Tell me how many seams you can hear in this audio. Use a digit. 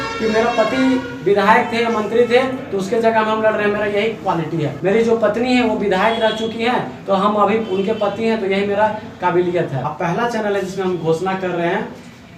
2